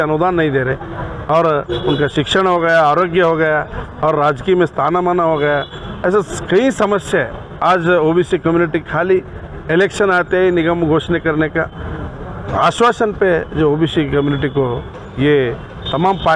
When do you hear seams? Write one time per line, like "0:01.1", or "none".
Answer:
none